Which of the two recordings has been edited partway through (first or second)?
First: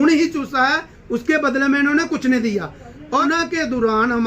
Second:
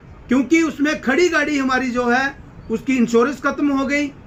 first